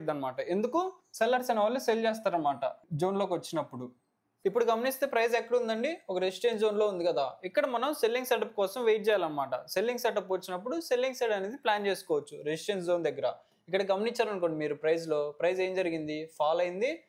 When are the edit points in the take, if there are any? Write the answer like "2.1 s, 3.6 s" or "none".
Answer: none

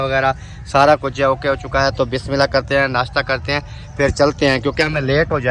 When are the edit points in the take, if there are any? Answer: none

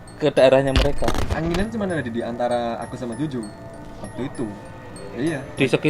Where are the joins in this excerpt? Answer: 1.2 s

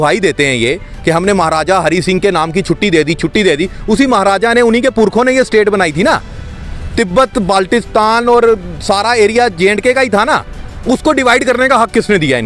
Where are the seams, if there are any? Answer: none

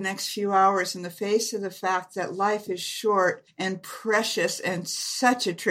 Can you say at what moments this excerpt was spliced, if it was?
3.5 s

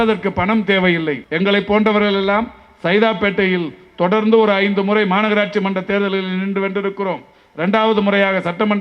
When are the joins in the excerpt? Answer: 1.2 s

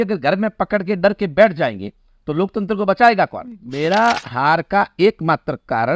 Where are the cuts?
3.7 s

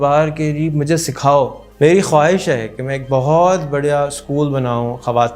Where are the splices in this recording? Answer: 1.6 s

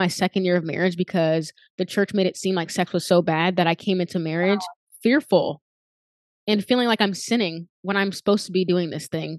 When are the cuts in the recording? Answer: none

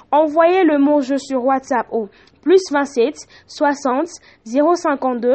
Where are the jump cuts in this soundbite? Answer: none

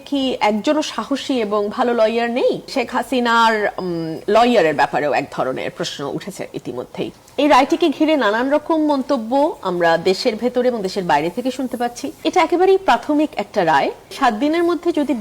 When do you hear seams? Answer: 2.7 s, 7.2 s, 12.2 s, 14.2 s

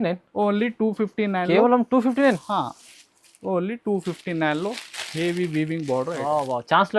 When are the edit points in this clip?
none

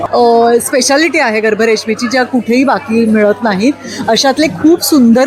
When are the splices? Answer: none

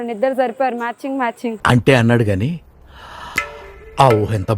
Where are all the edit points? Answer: none

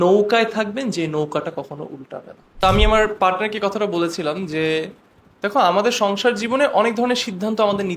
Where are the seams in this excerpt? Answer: 2.5 s

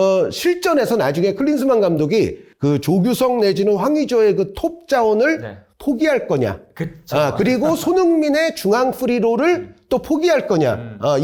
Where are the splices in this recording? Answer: none

